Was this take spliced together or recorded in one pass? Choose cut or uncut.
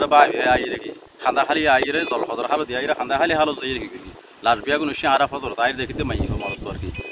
uncut